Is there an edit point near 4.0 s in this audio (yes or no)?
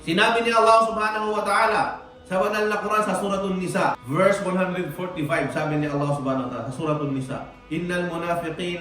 yes